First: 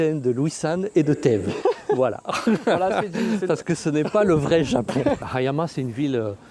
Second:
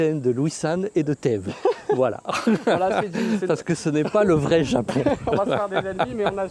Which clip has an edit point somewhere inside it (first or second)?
first